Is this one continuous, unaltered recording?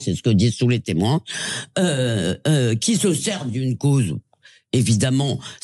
yes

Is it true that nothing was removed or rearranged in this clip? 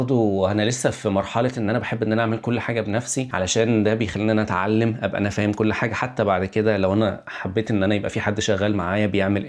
yes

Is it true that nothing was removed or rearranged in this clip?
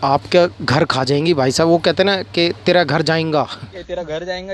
yes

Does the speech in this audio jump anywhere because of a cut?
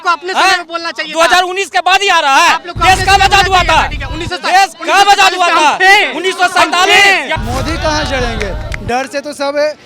yes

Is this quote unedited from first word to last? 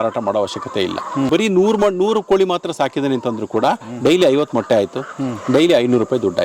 no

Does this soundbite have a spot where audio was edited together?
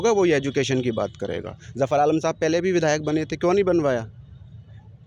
no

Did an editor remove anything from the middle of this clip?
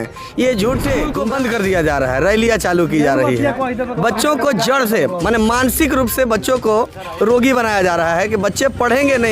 yes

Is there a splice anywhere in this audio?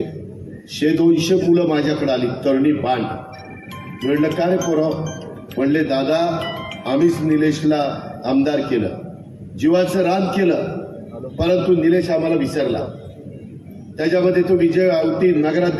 no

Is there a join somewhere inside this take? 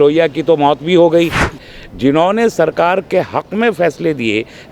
yes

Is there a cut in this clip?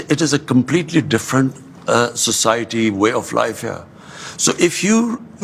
no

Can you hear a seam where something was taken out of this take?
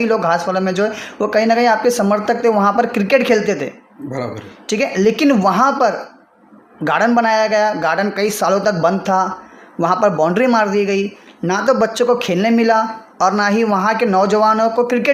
no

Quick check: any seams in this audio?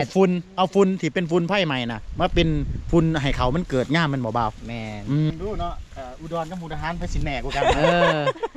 yes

